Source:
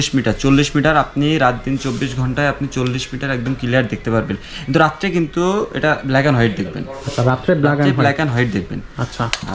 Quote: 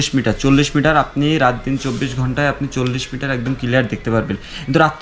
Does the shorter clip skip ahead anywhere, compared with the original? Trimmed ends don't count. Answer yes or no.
no